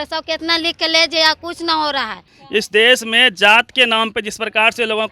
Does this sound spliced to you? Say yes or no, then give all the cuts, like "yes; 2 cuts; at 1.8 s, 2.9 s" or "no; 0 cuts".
yes; 1 cut; at 2.3 s